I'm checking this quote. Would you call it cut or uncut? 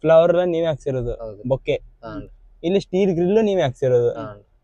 uncut